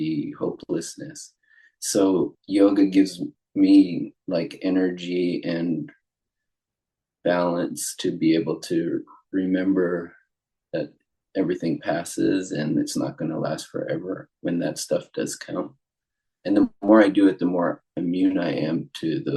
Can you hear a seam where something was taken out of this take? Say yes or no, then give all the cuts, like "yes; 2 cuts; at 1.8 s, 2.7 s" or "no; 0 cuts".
no; 0 cuts